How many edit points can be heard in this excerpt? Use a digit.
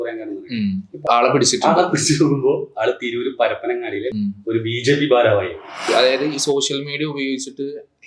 3